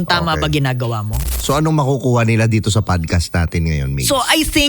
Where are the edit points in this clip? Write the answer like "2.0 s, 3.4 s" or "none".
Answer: 1.2 s